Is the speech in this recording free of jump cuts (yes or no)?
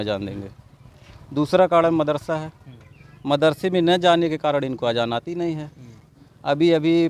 yes